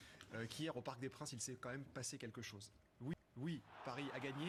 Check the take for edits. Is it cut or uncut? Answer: uncut